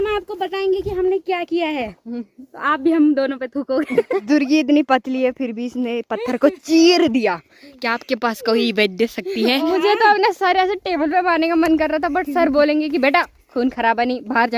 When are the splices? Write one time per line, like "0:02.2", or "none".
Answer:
0:04.2
0:09.7